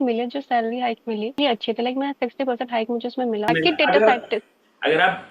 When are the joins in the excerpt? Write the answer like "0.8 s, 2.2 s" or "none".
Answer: 1.4 s, 3.5 s